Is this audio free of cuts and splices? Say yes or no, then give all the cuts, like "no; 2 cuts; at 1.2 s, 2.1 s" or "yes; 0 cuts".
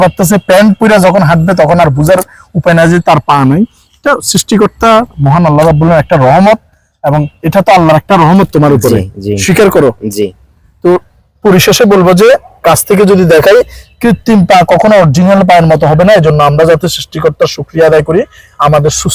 yes; 0 cuts